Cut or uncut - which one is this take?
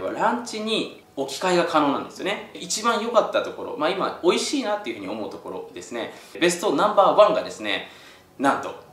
cut